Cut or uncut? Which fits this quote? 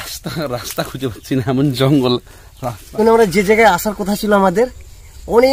cut